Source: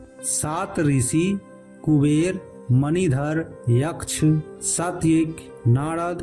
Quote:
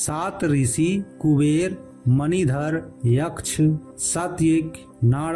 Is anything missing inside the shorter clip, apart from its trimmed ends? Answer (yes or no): yes